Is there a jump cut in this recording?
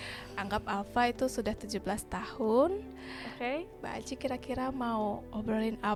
no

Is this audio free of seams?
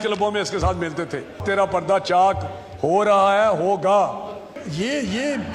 no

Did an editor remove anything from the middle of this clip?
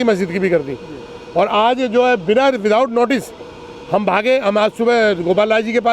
no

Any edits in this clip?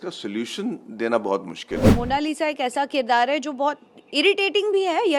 yes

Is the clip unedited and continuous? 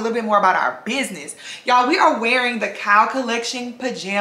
yes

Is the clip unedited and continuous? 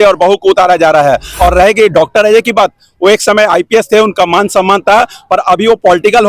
no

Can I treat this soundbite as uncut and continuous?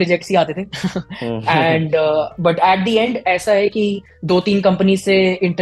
yes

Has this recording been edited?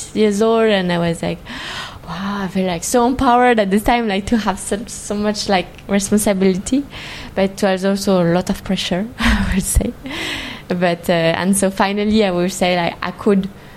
no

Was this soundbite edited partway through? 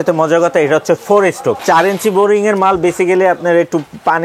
yes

